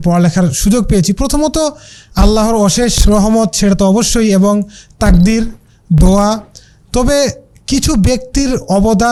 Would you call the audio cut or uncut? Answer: uncut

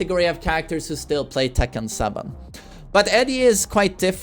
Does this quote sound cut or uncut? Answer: uncut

